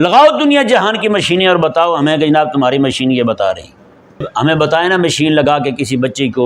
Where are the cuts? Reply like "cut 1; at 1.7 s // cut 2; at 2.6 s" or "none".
cut 1; at 4.3 s

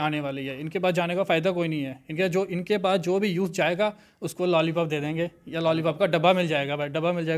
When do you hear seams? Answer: none

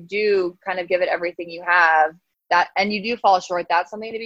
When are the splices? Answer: none

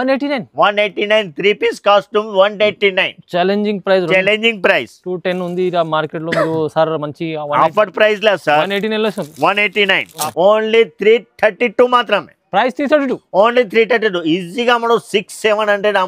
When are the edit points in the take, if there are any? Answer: cut 1; at 10.2 s

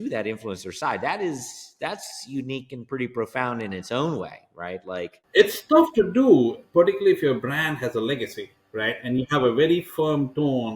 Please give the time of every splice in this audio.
cut 1; at 5.2 s

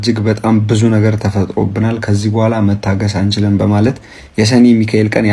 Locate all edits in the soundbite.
none

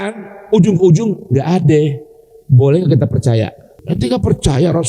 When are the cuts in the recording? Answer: cut 1; at 3.7 s

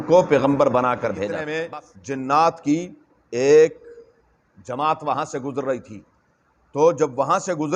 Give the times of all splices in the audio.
cut 1; at 1.2 s

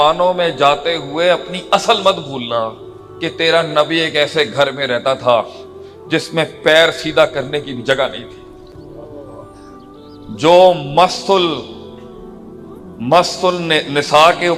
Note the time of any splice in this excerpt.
none

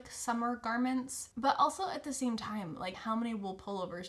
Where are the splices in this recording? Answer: cut 1; at 1.3 s

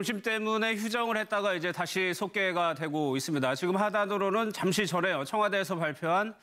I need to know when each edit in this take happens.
cut 1; at 3.5 s

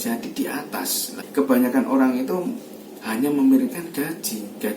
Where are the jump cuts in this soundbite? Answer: cut 1; at 1.2 s

